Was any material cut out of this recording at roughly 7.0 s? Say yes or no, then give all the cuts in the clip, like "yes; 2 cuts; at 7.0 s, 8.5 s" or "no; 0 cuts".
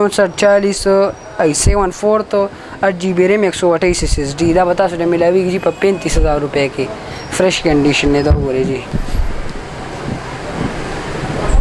no; 0 cuts